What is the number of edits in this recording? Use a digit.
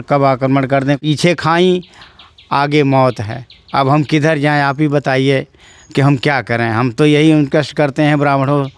1